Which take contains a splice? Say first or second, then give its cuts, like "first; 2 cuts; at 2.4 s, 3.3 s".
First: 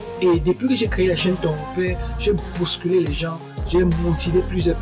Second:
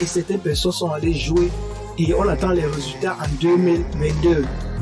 second; 1 cut; at 3.9 s